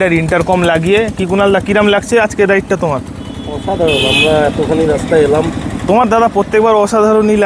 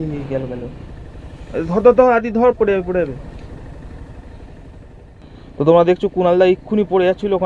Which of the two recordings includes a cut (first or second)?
second